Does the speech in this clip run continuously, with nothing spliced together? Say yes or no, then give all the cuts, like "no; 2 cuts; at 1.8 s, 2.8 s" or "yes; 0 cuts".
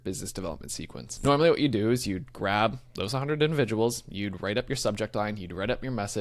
no; 1 cut; at 1.0 s